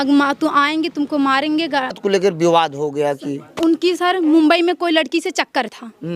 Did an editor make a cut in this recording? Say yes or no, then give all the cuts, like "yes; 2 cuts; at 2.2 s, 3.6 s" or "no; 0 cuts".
yes; 1 cut; at 2.0 s